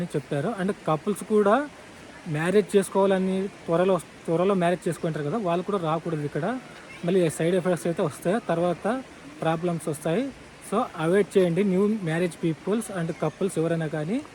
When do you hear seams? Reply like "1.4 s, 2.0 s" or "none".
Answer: none